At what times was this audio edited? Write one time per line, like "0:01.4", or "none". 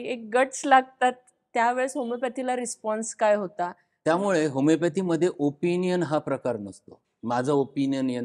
0:03.9